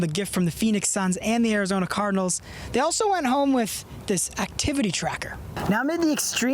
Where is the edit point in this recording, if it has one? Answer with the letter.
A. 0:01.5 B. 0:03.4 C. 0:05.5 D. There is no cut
C